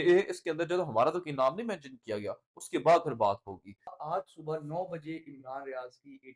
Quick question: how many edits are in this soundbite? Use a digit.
1